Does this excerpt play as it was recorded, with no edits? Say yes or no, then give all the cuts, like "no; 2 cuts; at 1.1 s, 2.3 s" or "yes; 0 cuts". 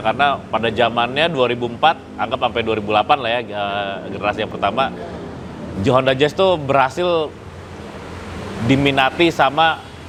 yes; 0 cuts